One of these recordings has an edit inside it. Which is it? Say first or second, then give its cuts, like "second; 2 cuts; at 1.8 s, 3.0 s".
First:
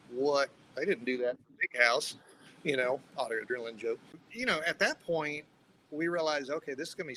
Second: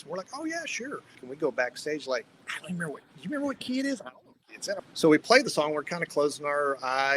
second; 2 cuts; at 1.3 s, 4.8 s